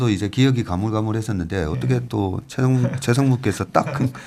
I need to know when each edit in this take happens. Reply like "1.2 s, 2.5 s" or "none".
none